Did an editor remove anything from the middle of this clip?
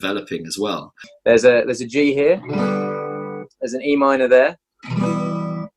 yes; 1 cut; at 1.1 s

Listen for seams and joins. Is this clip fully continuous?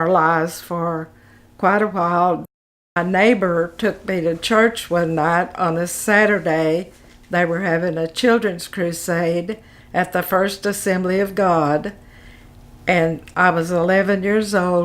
no; 1 cut; at 2.4 s

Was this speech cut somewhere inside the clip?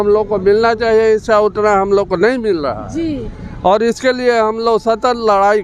no; 0 cuts

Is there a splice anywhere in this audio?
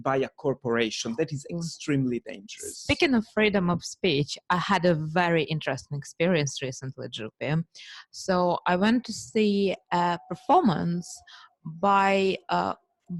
no; 0 cuts

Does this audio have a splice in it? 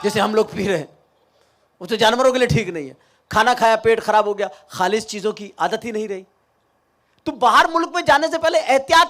no; 0 cuts

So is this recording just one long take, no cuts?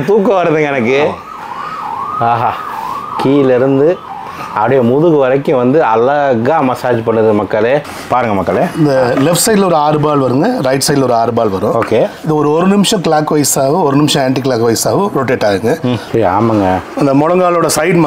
no; 2 cuts; at 7.9 s, 16.0 s

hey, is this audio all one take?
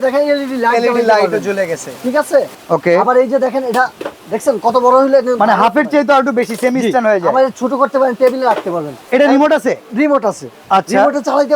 no; 3 cuts; at 2.6 s, 9.0 s, 10.5 s

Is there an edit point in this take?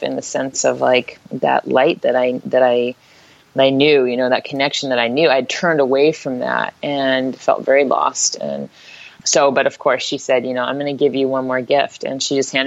yes; 1 cut; at 9.1 s

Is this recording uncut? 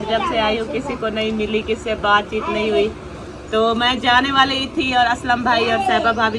yes; 0 cuts

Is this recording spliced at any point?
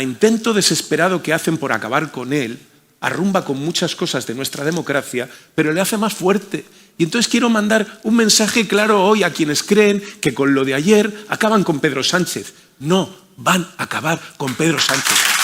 no; 0 cuts

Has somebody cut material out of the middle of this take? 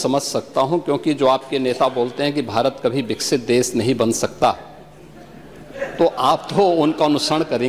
no; 0 cuts

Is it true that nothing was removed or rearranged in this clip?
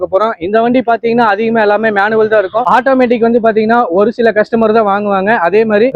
yes; 0 cuts

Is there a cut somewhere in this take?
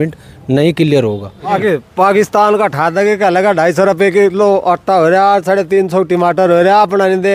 yes; 1 cut; at 1.5 s

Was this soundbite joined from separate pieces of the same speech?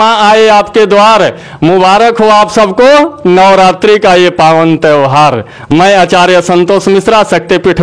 no; 0 cuts

